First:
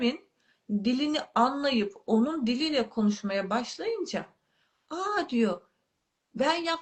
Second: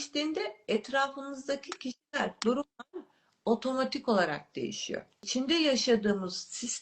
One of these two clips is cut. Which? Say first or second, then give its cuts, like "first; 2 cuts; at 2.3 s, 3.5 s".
second; 1 cut; at 5.2 s